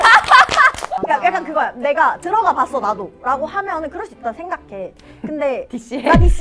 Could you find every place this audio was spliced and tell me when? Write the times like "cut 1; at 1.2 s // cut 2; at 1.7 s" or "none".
cut 1; at 1.0 s